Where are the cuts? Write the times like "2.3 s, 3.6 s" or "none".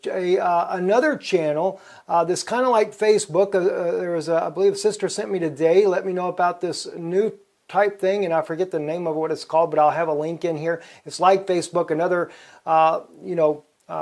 none